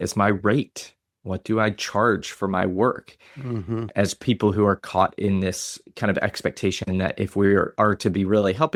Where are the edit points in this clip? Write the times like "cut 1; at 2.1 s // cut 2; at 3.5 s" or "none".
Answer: none